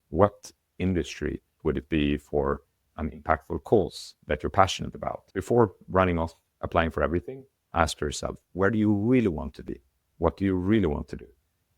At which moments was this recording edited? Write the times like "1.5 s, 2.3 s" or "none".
1.5 s, 5.2 s